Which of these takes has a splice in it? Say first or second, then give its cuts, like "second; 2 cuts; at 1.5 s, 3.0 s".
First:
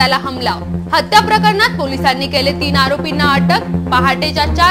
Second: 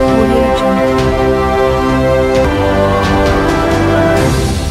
second; 1 cut; at 2.2 s